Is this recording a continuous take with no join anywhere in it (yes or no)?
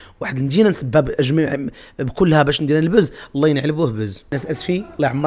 no